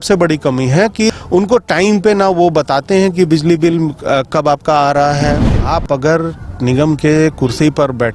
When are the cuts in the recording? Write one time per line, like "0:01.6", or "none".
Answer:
0:01.1
0:05.4

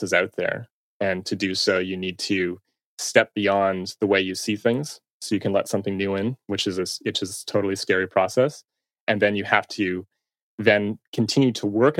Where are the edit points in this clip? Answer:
none

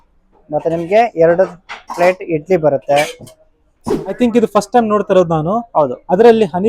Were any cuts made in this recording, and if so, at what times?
0:04.2

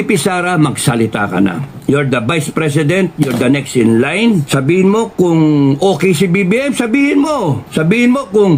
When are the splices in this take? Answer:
0:04.5
0:07.6

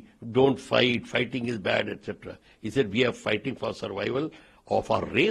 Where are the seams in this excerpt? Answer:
none

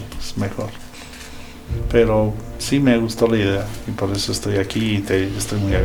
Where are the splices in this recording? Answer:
none

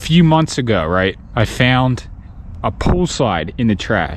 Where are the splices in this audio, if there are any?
0:01.2

